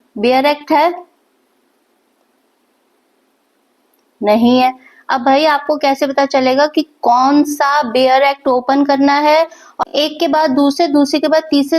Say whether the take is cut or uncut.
cut